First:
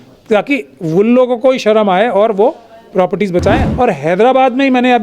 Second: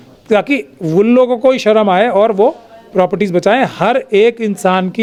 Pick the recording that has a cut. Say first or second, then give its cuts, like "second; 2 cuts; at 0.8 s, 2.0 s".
first; 1 cut; at 3.7 s